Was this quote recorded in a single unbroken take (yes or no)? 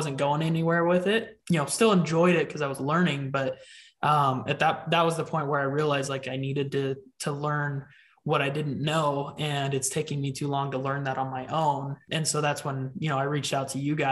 no